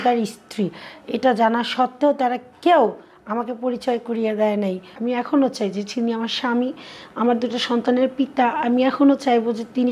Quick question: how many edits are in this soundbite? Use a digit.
1